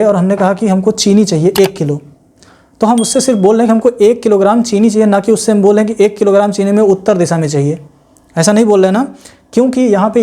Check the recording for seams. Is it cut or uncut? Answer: uncut